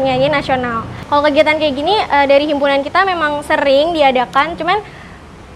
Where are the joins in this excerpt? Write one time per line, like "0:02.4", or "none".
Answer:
0:01.0